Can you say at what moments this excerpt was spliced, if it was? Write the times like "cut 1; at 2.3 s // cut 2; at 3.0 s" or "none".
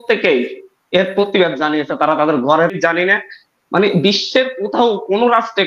cut 1; at 2.7 s